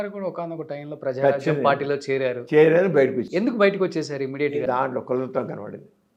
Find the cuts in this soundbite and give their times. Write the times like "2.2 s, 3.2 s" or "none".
4.6 s